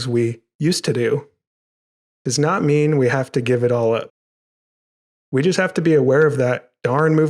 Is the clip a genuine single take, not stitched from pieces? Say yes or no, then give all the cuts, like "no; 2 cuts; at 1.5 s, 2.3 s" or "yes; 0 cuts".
yes; 0 cuts